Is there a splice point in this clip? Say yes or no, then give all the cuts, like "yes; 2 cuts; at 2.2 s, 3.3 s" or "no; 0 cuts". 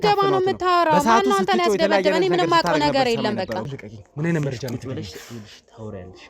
yes; 1 cut; at 3.7 s